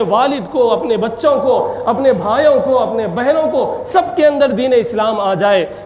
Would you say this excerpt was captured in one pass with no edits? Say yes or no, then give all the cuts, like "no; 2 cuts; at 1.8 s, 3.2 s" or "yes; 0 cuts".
yes; 0 cuts